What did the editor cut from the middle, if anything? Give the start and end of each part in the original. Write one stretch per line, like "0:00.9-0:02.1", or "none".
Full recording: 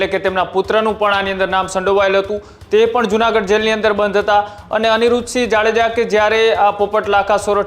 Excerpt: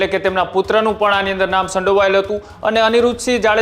0:02.5-0:04.6